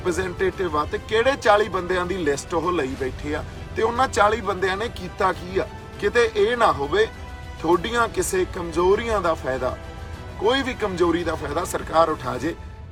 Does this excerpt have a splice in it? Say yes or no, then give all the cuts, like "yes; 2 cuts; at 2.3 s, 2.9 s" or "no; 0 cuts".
no; 0 cuts